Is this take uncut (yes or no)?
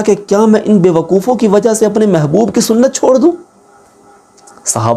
yes